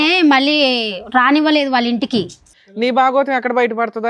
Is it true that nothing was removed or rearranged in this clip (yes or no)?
no